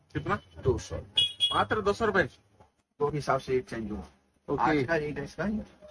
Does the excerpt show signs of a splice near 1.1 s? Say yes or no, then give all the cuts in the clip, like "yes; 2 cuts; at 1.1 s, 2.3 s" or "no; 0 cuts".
no; 1 cut; at 3.1 s